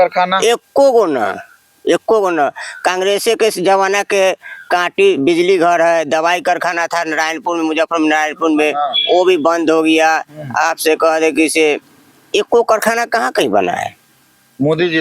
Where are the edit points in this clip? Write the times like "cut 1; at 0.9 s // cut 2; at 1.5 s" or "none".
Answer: none